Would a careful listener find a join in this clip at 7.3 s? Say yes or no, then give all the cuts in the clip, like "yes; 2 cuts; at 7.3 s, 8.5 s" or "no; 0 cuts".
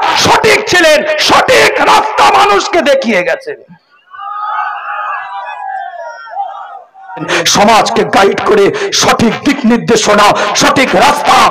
yes; 1 cut; at 7.3 s